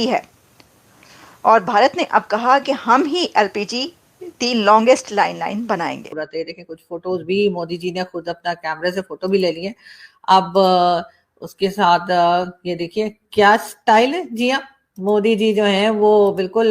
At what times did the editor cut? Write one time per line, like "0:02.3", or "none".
0:06.2

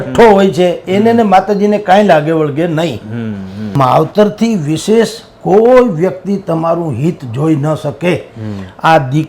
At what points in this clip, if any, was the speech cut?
0:03.8

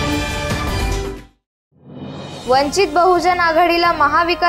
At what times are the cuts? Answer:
0:02.2

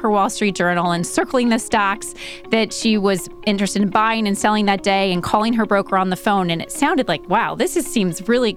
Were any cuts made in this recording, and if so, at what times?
none

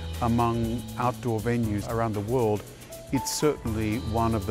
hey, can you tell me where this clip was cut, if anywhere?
0:01.8

